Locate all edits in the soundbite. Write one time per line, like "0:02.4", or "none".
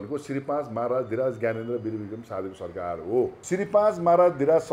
0:03.4